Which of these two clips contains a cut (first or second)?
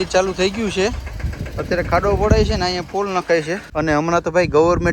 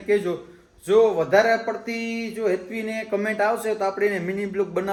first